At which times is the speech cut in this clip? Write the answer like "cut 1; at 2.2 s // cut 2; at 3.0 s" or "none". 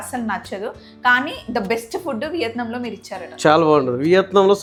none